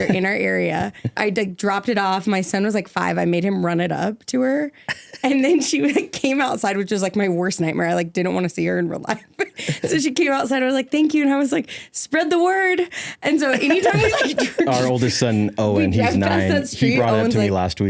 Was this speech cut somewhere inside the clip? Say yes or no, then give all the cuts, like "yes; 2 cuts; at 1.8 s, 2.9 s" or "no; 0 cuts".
yes; 1 cut; at 1.2 s